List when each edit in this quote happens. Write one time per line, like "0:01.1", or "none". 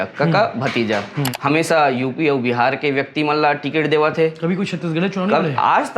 0:01.3